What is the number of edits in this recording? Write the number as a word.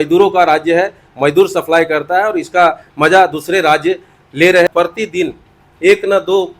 one